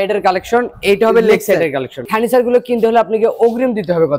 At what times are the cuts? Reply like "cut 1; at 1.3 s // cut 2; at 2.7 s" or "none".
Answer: cut 1; at 2.1 s